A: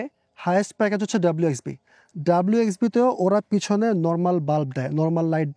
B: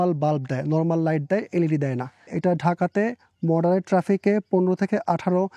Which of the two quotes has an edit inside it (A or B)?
B